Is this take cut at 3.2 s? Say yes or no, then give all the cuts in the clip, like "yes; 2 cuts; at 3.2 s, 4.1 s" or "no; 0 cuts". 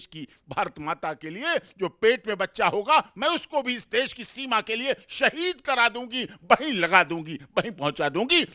no; 0 cuts